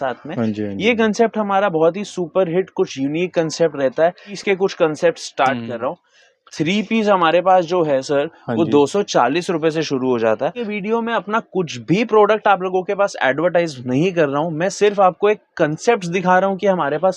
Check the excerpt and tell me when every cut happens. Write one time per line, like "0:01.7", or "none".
0:04.3
0:10.6

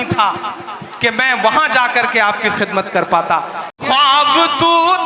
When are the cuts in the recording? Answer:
0:03.7

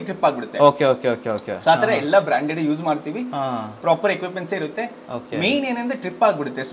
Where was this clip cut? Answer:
none

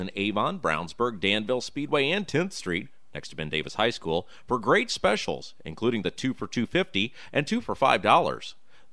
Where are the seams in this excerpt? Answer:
none

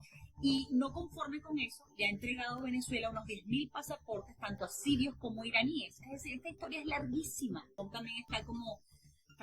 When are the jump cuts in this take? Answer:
0:07.7

